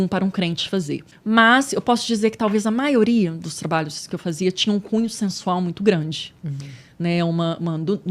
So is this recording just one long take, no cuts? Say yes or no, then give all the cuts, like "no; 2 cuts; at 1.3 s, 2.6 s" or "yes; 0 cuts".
no; 1 cut; at 1.1 s